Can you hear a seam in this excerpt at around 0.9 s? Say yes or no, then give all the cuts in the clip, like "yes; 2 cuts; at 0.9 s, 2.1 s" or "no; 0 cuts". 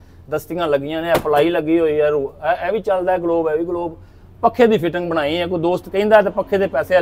no; 0 cuts